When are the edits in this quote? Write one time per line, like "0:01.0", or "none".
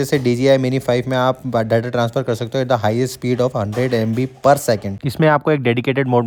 none